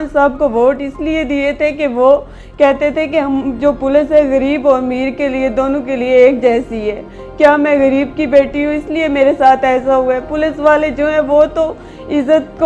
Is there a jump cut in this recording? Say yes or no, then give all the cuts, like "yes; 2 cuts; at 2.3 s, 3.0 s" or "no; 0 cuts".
no; 0 cuts